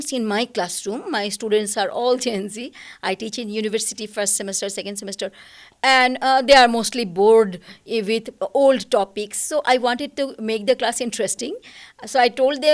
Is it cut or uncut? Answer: uncut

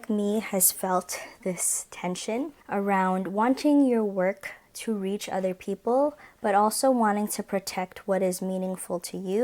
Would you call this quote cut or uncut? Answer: uncut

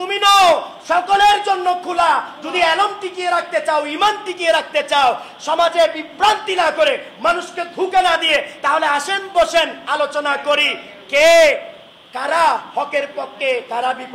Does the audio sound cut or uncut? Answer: uncut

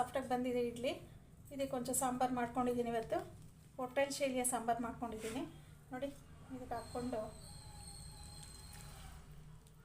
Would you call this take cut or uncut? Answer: cut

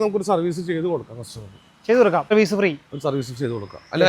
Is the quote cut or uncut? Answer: cut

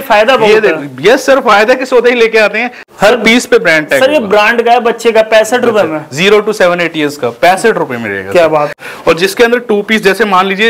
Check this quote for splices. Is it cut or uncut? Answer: cut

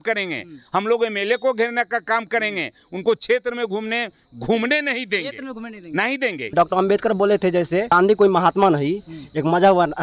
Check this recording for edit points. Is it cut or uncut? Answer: cut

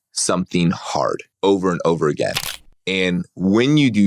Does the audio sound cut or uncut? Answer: cut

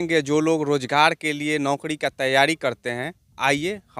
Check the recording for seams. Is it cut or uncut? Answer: uncut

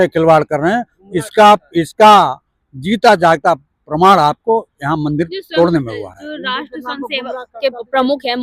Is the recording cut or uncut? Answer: uncut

